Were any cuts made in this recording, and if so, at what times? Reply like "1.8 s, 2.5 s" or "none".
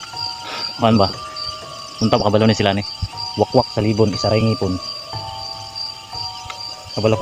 none